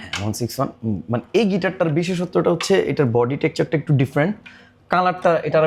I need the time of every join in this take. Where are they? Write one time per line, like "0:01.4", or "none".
none